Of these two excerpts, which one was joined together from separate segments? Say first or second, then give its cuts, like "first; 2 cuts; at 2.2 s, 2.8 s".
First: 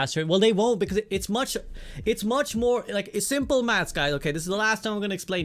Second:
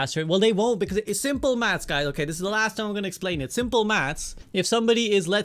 second; 1 cut; at 1.1 s